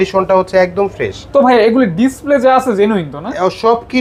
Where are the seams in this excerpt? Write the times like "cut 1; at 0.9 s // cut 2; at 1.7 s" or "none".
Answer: none